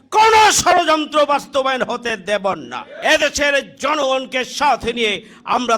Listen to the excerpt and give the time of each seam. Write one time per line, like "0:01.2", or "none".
0:02.8